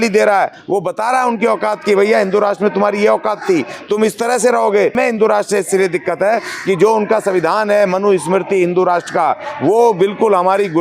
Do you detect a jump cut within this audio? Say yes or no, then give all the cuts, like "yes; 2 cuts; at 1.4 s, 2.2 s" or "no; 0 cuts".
yes; 1 cut; at 4.9 s